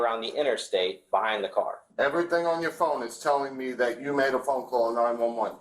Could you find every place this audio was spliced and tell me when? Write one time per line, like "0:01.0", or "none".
0:01.8